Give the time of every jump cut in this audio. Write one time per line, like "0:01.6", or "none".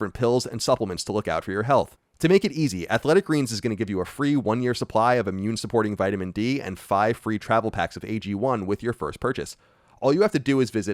none